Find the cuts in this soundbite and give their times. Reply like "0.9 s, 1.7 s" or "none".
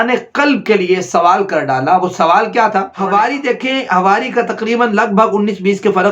2.9 s